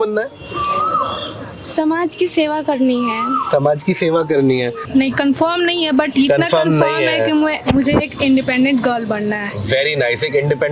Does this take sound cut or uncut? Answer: cut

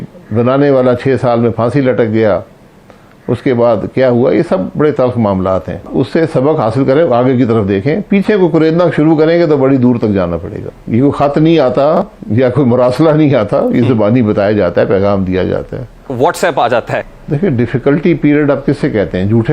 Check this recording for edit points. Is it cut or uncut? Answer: cut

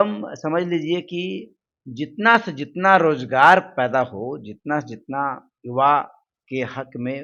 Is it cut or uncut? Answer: uncut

